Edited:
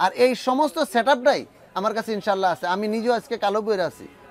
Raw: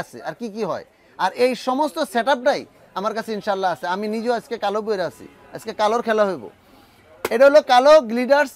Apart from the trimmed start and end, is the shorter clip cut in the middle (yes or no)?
no